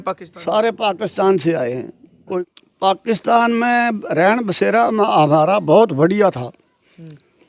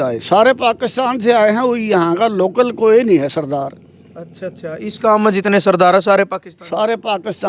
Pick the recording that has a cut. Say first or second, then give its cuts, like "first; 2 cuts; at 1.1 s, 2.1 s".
first; 1 cut; at 2.2 s